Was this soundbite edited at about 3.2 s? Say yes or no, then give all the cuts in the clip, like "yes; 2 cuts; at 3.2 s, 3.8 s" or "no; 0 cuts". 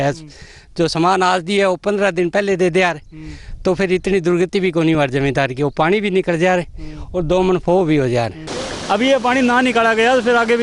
no; 1 cut; at 8.4 s